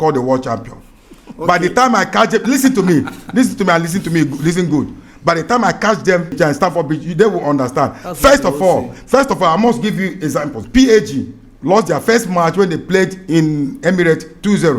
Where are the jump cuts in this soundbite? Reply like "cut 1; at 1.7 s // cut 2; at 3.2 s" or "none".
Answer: cut 1; at 6.4 s // cut 2; at 10.6 s